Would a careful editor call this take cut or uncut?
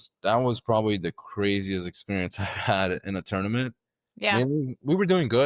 uncut